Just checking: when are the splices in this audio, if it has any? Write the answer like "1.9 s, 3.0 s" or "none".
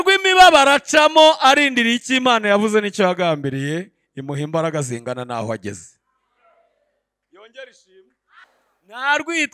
8.5 s